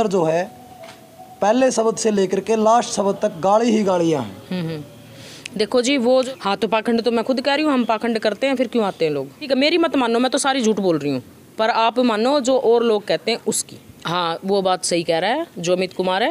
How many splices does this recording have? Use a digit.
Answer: 3